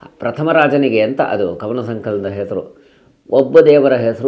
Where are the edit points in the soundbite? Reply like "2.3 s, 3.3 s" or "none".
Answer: none